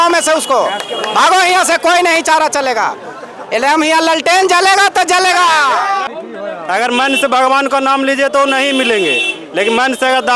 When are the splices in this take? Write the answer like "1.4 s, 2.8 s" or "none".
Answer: 6.1 s